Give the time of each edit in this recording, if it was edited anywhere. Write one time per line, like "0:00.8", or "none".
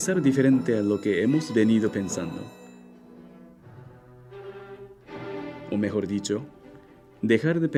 none